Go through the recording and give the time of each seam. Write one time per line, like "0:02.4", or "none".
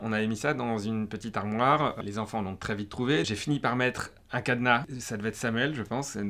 0:02.0
0:04.9

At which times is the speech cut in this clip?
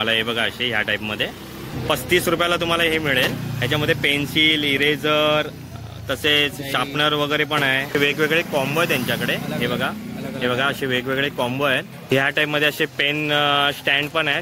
0:01.7
0:07.9
0:12.1

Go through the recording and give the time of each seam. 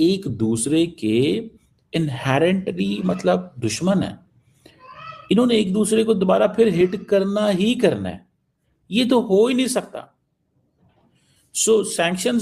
none

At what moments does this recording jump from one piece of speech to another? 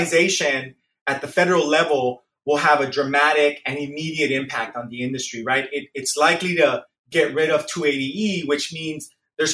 none

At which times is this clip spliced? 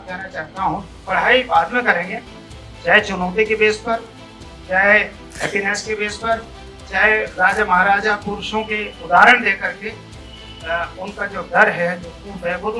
0:00.9

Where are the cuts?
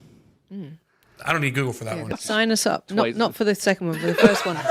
0:02.2

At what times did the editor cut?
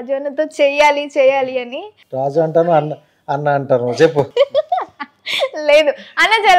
none

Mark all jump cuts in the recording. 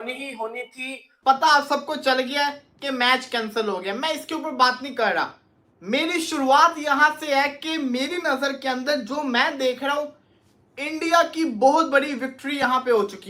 0:01.2

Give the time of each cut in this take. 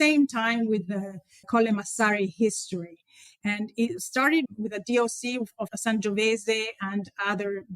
0:04.5
0:05.7

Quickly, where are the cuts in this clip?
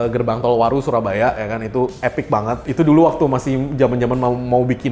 none

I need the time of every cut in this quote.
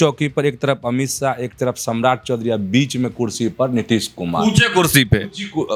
none

